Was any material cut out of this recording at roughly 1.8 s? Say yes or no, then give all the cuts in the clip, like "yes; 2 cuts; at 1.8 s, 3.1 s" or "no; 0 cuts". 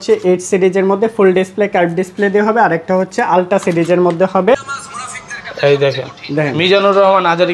no; 1 cut; at 4.7 s